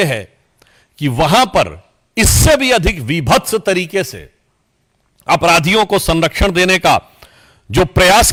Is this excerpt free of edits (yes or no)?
yes